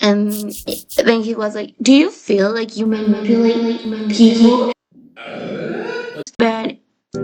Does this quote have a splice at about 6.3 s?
yes; 1 cut; at 6.3 s

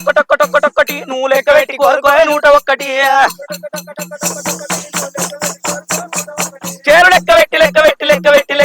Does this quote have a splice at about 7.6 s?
no; 0 cuts

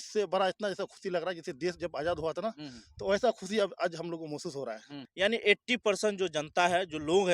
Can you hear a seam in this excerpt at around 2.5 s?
no; 1 cut; at 5.0 s

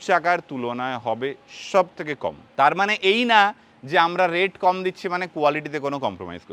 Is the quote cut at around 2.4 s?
no; 0 cuts

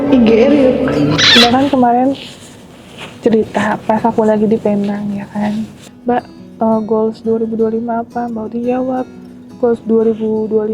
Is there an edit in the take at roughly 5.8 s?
yes; 2 cuts; at 1.2 s, 5.8 s

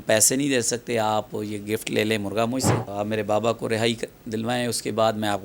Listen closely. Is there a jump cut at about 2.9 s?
yes; 1 cut; at 2.9 s

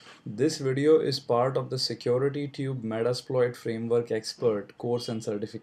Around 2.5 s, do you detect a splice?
yes; 1 cut; at 2.5 s

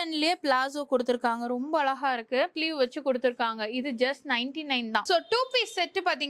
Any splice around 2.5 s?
yes; 2 cuts; at 2.5 s, 5.0 s

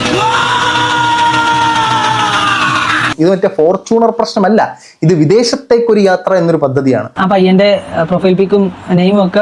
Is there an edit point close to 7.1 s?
yes; 2 cuts; at 3.1 s, 7.1 s

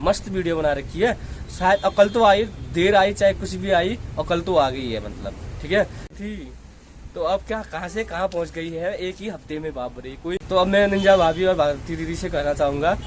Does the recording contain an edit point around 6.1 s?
yes; 2 cuts; at 6.1 s, 10.4 s

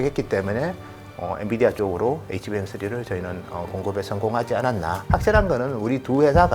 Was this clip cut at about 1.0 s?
no; 1 cut; at 5.0 s

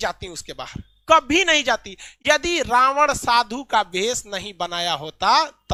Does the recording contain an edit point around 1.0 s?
no; 0 cuts

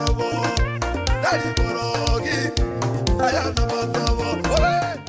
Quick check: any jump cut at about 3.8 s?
yes; 1 cut; at 3.8 s

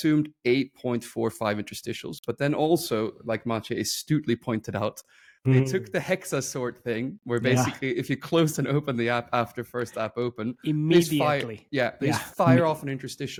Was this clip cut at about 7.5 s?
no; 0 cuts

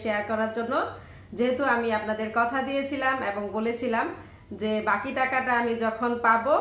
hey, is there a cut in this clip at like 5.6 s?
no; 0 cuts

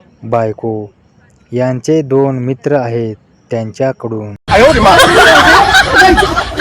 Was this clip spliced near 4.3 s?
yes; 1 cut; at 4.3 s

